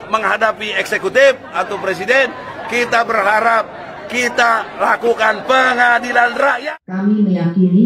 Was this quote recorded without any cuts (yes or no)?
no